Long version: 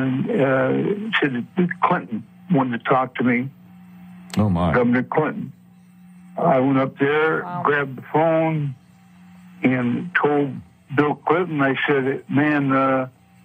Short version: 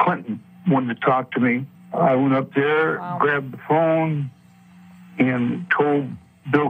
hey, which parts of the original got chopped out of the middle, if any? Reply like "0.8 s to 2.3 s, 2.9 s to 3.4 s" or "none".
3.6 s to 6.2 s